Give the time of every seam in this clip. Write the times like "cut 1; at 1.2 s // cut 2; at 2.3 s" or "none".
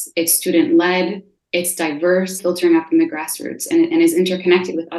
cut 1; at 2.4 s